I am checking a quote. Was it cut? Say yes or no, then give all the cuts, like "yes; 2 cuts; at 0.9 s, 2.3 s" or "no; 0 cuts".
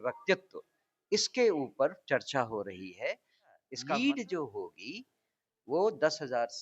yes; 1 cut; at 3.7 s